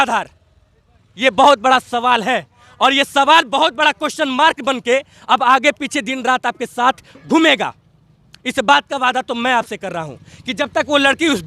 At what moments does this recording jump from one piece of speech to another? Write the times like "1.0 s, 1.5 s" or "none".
none

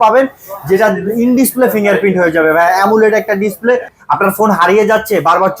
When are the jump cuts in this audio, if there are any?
3.9 s

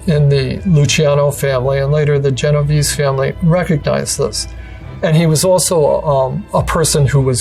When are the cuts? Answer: 6.4 s

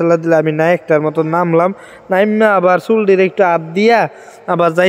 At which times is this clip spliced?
none

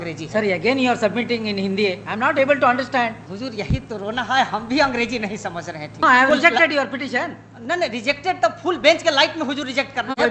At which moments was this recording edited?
3.3 s, 6.0 s

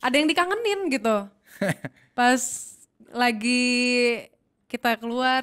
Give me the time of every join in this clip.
none

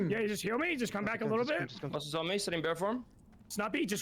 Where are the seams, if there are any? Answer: 1.6 s

